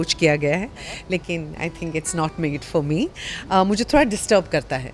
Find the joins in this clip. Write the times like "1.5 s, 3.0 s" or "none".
none